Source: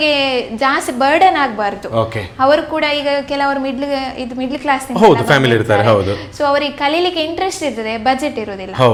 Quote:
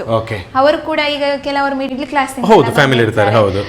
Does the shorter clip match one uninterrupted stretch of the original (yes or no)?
no